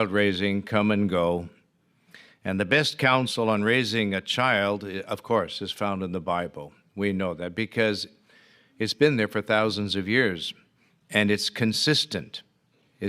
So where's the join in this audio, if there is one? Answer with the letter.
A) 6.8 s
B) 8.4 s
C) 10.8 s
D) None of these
D